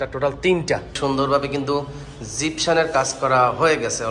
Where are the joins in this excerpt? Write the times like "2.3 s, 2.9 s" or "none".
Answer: 0.9 s